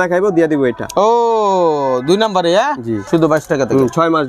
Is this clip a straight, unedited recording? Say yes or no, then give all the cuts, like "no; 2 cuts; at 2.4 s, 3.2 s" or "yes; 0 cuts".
no; 1 cut; at 2.9 s